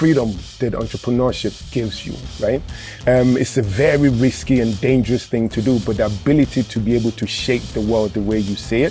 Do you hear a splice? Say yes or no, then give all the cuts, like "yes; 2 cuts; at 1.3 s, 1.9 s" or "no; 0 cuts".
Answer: no; 0 cuts